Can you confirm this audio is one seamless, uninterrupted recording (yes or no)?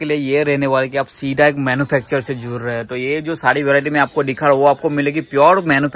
yes